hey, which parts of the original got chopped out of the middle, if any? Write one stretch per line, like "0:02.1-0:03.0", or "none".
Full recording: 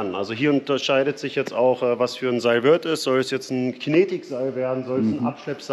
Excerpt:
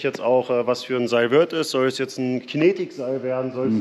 none